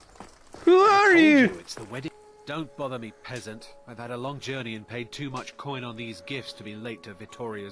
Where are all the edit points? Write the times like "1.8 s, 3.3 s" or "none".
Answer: none